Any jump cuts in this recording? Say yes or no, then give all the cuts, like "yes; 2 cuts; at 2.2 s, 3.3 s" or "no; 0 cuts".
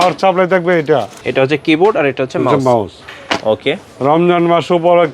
yes; 1 cut; at 1.2 s